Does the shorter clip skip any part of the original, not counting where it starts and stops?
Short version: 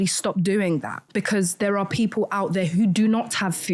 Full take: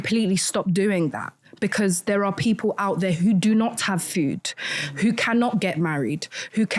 yes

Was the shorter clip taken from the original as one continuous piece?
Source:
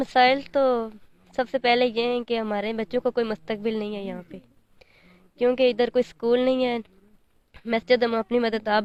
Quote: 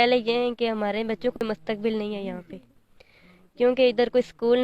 no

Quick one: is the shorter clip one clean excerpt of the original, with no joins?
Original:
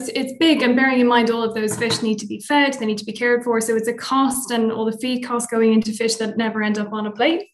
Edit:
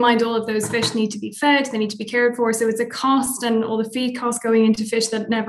yes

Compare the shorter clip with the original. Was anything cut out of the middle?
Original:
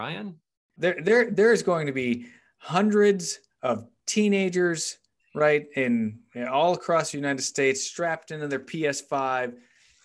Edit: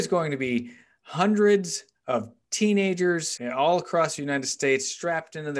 yes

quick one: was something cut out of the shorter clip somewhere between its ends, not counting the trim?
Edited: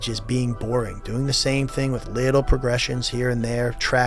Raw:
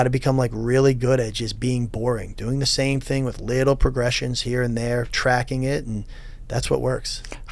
no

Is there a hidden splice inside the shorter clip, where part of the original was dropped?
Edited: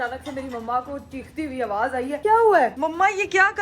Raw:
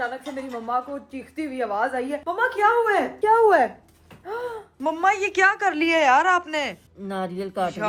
yes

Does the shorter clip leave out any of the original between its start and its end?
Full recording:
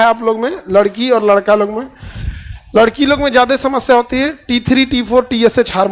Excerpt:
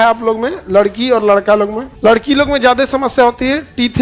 yes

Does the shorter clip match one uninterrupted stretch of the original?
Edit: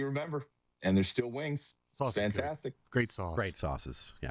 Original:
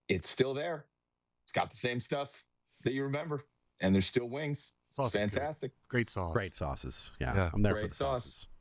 yes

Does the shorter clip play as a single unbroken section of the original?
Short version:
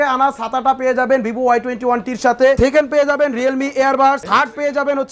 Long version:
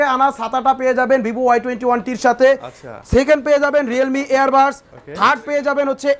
no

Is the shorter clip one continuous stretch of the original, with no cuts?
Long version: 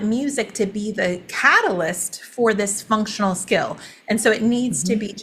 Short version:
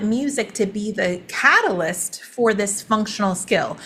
yes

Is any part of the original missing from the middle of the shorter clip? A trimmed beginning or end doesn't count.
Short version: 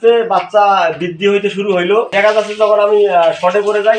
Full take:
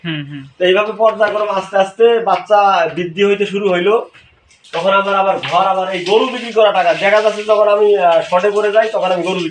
yes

